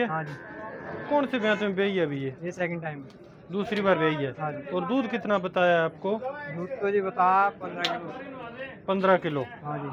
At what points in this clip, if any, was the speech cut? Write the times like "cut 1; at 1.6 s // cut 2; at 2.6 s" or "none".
none